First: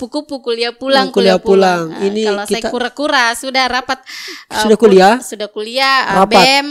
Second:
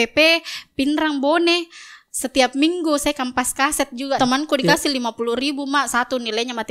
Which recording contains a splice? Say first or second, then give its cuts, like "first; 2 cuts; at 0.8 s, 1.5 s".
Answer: second; 1 cut; at 4.2 s